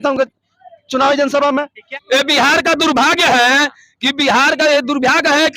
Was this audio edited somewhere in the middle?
yes; 1 cut; at 1.8 s

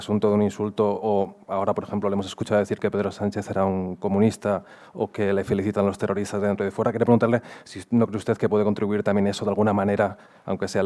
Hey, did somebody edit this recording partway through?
no; 0 cuts

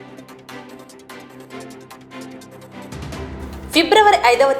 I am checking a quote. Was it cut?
yes; 1 cut; at 1.5 s

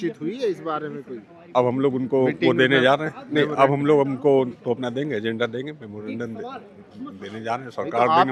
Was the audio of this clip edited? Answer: no; 0 cuts

